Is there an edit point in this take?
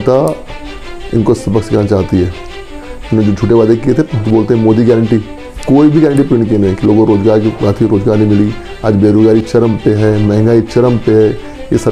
no; 0 cuts

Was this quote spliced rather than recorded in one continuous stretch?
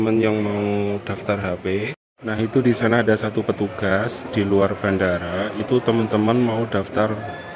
yes; 1 cut; at 2.1 s

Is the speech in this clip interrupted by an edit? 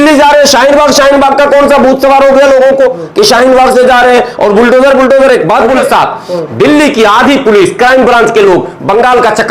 yes; 1 cut; at 5.8 s

